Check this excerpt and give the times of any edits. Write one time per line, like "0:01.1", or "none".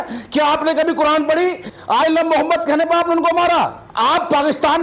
0:01.7
0:03.8